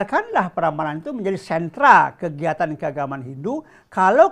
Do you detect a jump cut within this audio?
no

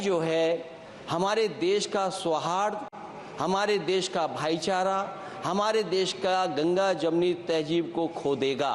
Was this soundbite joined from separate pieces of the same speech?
no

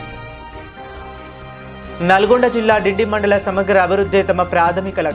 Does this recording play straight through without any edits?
yes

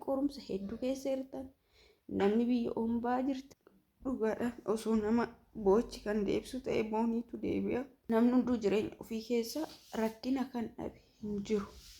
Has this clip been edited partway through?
yes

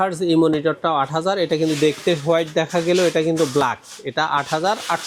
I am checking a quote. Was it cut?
no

